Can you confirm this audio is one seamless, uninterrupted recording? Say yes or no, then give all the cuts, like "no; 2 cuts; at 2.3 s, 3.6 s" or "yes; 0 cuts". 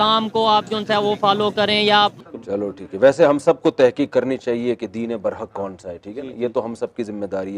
no; 1 cut; at 2.2 s